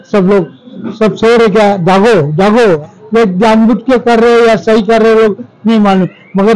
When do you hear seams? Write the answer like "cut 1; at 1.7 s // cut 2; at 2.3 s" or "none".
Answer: cut 1; at 2.8 s